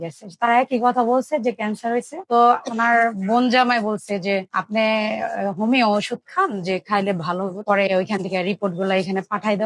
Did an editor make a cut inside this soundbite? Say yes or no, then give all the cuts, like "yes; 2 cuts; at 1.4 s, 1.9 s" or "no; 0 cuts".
yes; 2 cuts; at 2.2 s, 7.6 s